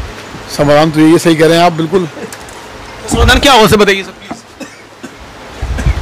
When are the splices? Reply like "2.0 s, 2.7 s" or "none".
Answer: none